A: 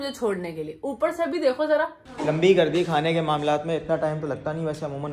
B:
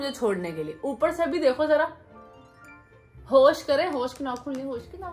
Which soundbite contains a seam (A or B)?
A